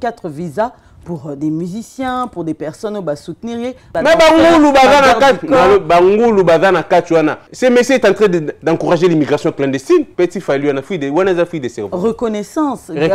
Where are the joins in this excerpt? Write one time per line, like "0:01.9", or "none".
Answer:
0:03.9
0:07.5
0:10.1